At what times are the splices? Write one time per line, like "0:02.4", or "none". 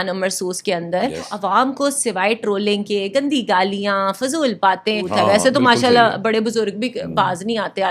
0:01.3
0:05.1